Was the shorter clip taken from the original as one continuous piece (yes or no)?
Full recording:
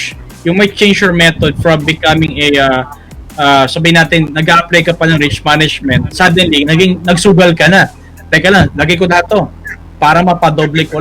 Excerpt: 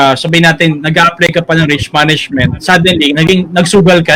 yes